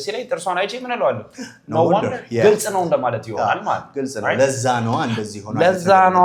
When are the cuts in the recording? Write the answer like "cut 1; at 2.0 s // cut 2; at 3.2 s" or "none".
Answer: none